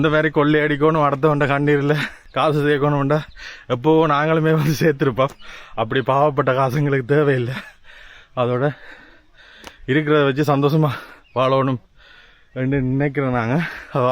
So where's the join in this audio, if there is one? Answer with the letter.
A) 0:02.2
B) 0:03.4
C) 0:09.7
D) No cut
A